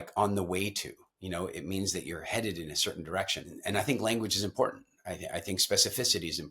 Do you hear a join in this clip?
yes; 1 cut; at 3.6 s

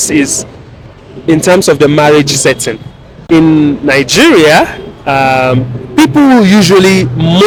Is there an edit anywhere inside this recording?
no; 0 cuts

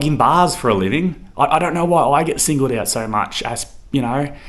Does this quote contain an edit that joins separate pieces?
no; 0 cuts

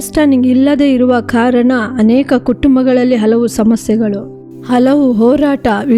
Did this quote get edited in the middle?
no; 0 cuts

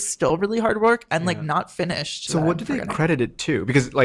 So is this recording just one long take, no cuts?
no; 1 cut; at 2.1 s

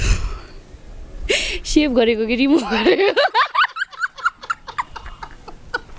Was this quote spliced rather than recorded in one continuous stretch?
no; 0 cuts

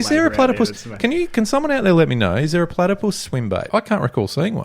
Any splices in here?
yes; 1 cut; at 3.7 s

